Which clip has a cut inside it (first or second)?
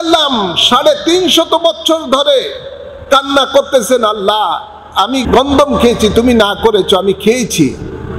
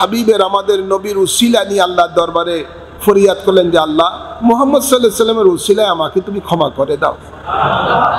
first